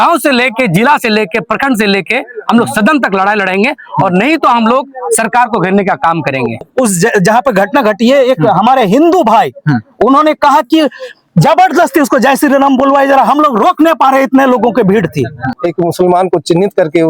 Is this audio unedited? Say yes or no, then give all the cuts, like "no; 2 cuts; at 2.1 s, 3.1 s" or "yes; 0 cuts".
no; 2 cuts; at 6.7 s, 15.3 s